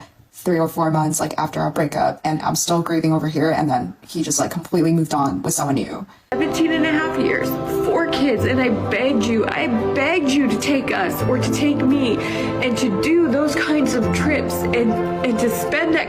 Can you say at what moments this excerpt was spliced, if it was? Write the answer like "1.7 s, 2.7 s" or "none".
6.3 s